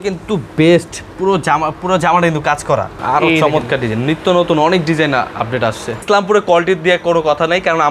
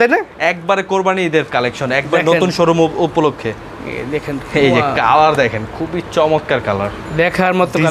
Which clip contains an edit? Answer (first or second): first